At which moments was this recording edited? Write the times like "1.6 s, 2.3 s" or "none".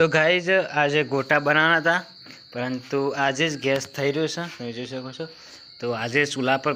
none